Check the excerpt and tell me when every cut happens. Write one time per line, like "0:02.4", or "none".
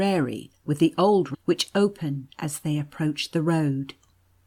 none